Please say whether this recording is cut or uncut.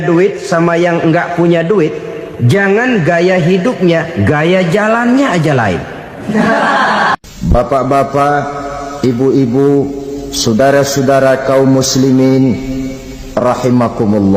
cut